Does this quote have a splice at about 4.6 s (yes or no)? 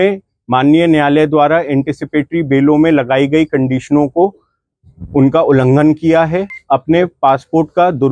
no